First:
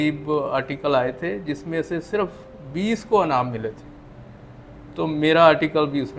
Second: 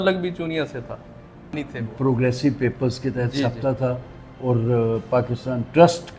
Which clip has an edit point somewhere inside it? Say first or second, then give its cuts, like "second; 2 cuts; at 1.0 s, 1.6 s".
second; 1 cut; at 1.5 s